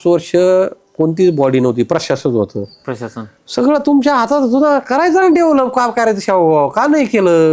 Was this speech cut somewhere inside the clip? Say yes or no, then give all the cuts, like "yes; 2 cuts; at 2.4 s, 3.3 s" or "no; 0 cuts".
no; 0 cuts